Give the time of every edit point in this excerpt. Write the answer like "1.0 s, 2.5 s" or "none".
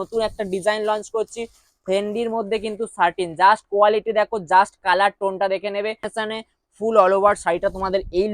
6.1 s